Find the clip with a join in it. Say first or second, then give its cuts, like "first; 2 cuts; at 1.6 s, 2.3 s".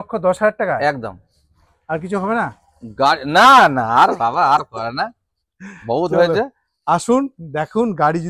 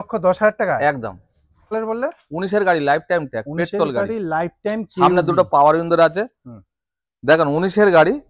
second; 1 cut; at 1.7 s